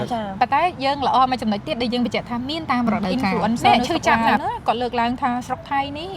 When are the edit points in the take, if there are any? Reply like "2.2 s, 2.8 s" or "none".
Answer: 4.4 s